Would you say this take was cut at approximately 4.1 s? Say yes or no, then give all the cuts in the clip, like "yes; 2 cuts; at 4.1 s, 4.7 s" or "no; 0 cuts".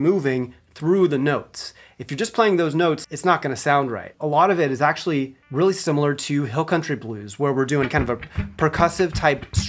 yes; 2 cuts; at 3.0 s, 4.1 s